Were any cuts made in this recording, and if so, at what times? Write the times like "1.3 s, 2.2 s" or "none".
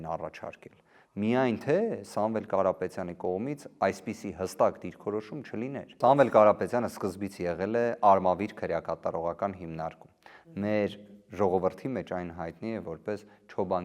6.0 s

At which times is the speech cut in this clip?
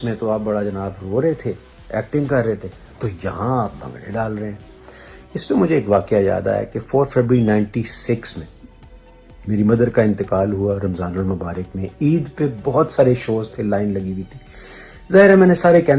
none

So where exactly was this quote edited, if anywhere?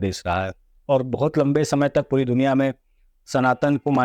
none

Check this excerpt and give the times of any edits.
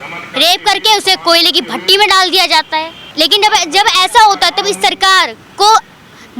3.0 s

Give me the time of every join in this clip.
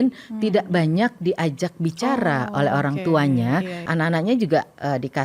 3.9 s

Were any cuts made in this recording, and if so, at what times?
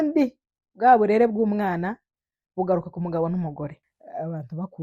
3.9 s

